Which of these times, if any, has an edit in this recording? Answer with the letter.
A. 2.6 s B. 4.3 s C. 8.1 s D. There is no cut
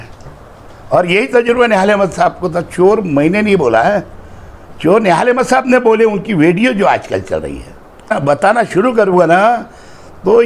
C